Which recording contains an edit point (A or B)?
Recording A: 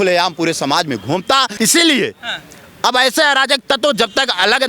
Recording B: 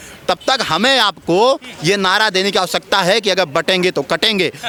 A